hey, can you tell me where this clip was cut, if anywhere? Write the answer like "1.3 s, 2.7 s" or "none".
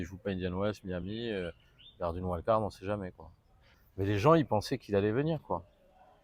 none